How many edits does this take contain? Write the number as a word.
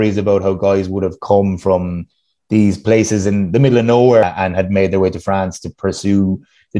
one